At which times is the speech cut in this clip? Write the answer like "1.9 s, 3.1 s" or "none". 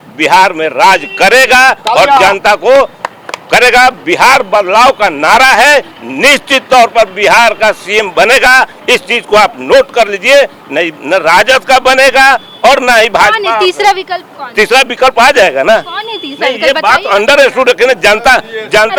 none